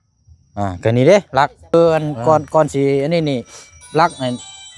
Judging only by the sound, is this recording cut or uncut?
cut